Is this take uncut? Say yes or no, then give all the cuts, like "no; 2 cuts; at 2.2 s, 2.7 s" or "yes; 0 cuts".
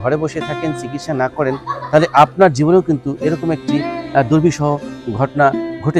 yes; 0 cuts